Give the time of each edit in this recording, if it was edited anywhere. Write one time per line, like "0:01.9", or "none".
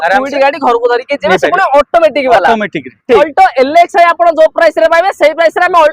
0:03.2